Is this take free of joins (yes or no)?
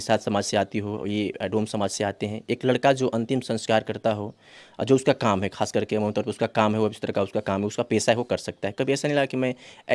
yes